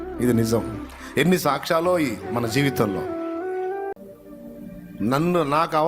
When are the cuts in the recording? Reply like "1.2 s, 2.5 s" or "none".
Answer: 3.9 s